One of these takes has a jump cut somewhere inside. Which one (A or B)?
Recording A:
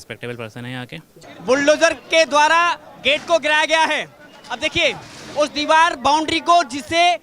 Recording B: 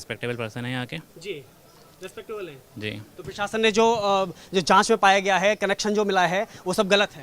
A